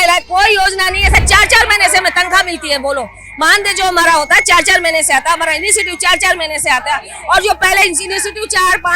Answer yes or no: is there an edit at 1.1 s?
yes